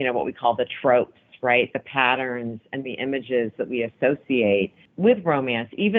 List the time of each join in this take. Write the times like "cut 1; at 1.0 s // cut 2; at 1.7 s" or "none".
cut 1; at 4.8 s